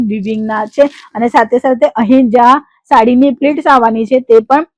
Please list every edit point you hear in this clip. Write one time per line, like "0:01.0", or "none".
none